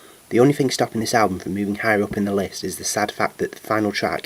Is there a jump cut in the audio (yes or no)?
no